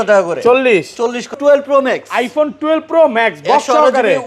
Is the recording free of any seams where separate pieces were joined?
no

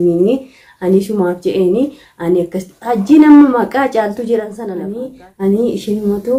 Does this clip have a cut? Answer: yes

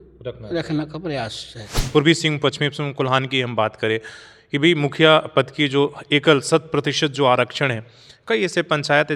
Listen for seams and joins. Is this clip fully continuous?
no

